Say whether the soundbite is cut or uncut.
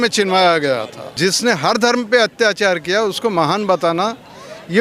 cut